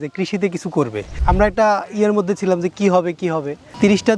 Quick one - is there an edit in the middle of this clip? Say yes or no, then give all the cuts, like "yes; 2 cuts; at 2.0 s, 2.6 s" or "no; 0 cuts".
yes; 1 cut; at 1.1 s